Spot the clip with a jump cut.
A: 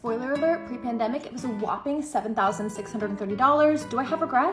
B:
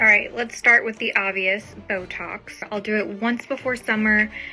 B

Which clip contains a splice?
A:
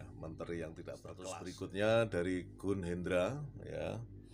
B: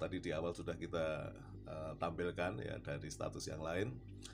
A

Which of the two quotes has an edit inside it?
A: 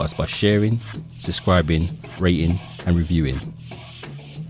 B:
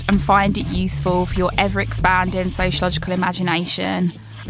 A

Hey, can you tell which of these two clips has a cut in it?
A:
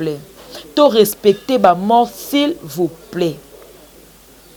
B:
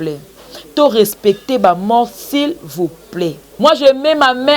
B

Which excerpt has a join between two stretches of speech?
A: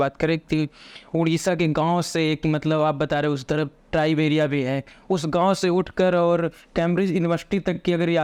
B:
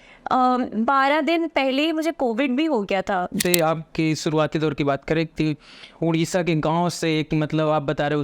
B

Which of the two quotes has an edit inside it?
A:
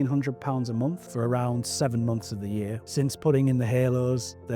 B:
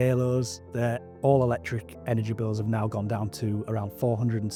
A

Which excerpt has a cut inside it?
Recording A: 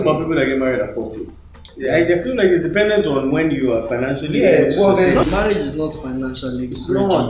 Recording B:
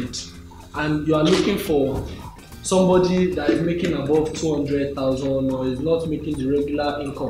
A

